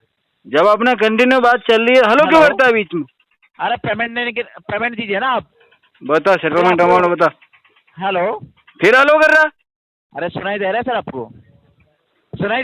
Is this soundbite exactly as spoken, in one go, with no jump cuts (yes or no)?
yes